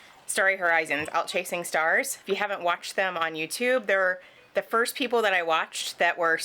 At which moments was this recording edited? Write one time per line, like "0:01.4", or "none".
none